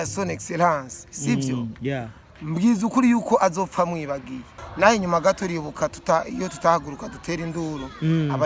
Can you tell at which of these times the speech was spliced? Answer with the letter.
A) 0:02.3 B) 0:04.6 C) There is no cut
B